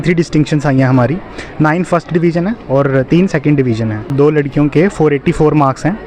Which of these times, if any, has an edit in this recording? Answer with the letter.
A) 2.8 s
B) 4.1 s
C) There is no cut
B